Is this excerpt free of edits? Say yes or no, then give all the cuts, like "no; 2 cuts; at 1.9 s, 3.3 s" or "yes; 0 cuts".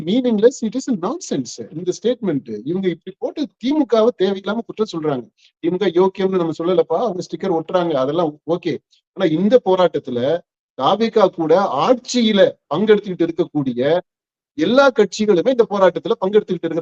yes; 0 cuts